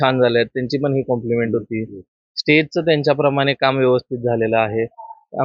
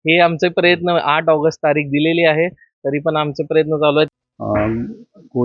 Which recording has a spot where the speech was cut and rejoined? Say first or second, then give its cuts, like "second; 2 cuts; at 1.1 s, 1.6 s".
second; 1 cut; at 4.1 s